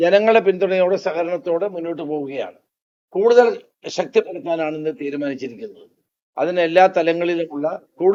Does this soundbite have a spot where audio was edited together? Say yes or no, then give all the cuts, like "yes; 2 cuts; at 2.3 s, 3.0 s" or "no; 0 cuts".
no; 0 cuts